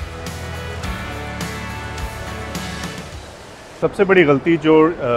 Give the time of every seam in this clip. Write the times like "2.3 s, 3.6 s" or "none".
3.7 s